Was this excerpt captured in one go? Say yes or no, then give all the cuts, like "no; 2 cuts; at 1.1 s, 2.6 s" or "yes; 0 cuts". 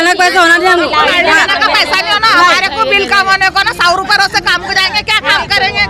yes; 0 cuts